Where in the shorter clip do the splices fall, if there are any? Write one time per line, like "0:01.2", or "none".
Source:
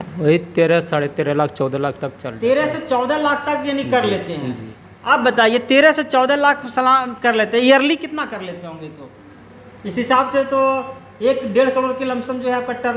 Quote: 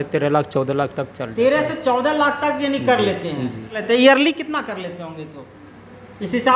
0:03.8